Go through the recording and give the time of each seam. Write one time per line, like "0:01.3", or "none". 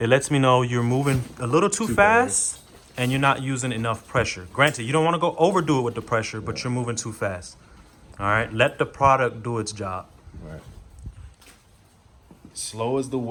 none